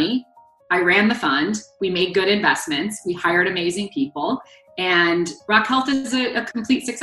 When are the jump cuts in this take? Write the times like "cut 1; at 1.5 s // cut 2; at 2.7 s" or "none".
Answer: none